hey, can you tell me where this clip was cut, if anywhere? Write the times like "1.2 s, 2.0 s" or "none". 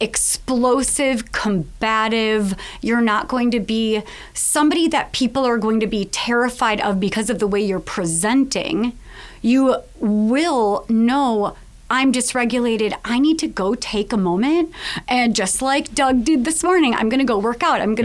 none